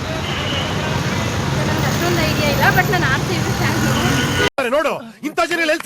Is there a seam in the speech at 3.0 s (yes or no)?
yes